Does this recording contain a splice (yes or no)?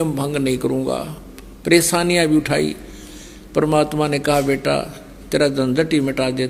no